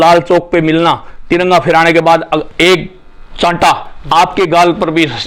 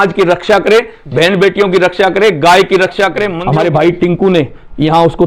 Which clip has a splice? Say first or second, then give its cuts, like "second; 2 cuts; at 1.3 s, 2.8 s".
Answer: second; 1 cut; at 3.2 s